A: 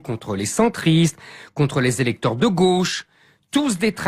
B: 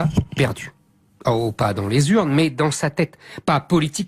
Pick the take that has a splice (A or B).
A